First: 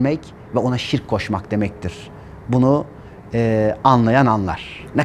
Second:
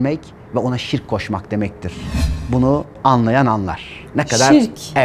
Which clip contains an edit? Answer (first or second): second